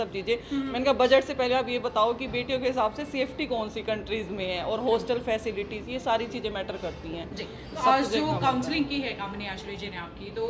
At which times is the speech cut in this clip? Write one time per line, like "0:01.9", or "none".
none

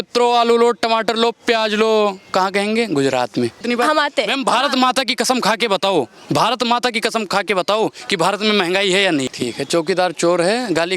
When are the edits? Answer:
0:03.6
0:09.3

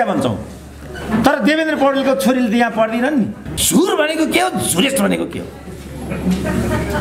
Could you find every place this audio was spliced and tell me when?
0:03.5

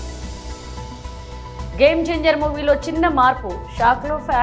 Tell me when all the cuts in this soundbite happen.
none

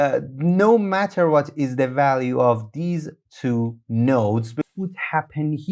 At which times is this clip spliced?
0:04.7

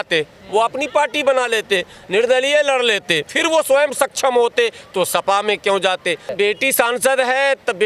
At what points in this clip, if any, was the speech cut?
0:03.3
0:06.3

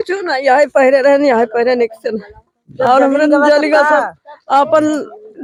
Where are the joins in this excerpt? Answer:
none

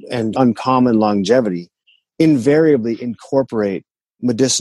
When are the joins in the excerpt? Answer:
none

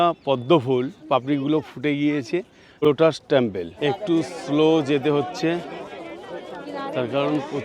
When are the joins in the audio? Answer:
0:02.6
0:03.7

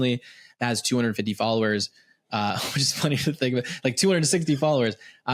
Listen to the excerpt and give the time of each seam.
none

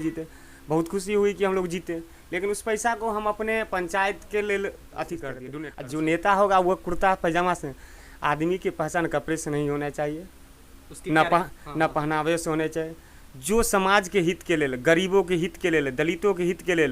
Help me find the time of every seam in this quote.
0:05.4

